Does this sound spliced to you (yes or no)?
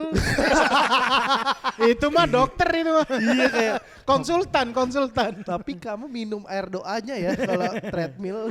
no